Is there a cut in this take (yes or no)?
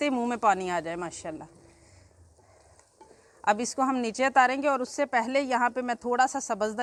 no